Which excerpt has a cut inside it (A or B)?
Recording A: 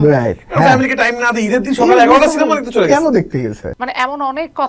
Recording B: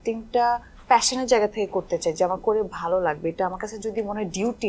A